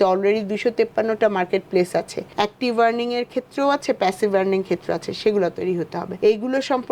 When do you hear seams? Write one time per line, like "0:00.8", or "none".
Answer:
0:06.0

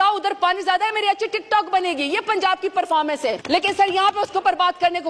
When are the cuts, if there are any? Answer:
0:03.4

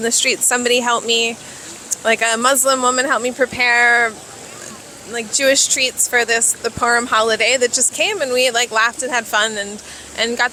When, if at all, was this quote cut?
none

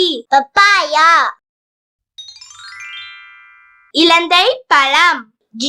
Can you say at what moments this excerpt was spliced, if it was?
0:02.2
0:03.7

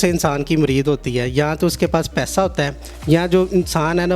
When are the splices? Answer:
none

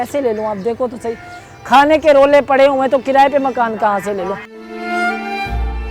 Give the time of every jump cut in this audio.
0:04.6

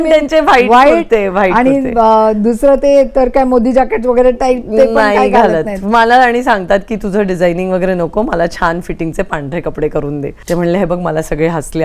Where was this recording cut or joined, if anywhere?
0:10.3

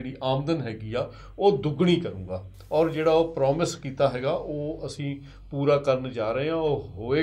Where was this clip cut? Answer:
none

